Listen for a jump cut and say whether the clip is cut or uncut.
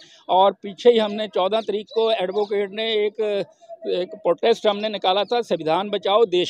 uncut